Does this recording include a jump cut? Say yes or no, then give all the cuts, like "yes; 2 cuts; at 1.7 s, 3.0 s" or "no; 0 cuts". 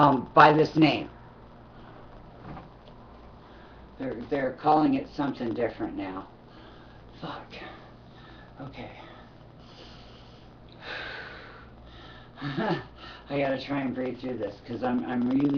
no; 0 cuts